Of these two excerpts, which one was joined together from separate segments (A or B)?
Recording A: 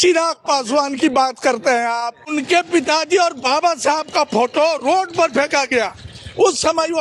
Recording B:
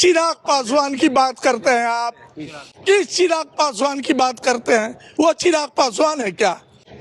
A